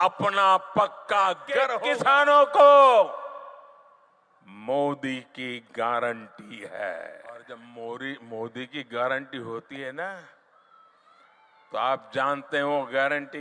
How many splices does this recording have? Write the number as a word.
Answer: two